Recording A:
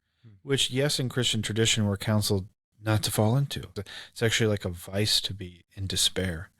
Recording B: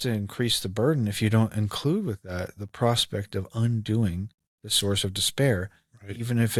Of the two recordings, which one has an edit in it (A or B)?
A